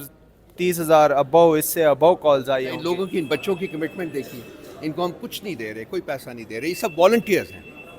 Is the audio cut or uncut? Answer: cut